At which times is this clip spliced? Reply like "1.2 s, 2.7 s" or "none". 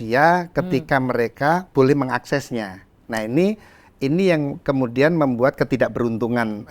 1.7 s